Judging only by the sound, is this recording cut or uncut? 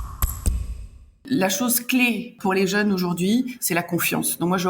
cut